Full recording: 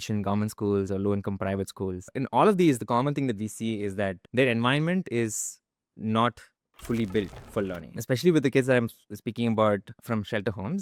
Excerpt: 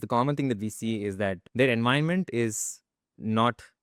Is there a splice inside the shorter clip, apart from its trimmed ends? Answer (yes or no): no